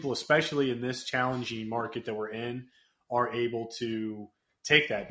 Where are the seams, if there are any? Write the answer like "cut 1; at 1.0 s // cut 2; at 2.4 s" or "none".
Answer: none

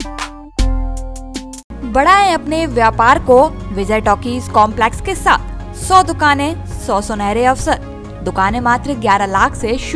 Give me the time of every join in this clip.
none

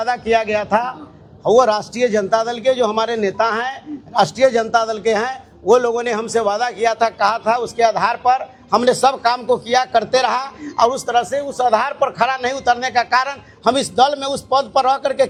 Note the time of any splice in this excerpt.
none

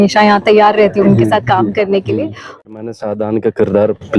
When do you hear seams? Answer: cut 1; at 2.6 s

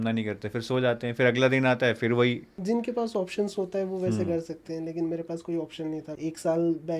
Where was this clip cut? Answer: cut 1; at 2.5 s // cut 2; at 6.1 s

